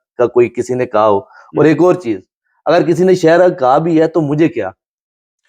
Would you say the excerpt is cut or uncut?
uncut